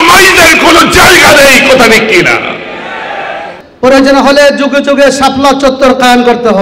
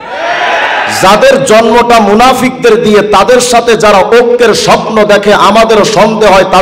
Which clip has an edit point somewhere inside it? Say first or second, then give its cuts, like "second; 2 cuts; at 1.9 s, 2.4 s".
first; 1 cut; at 3.5 s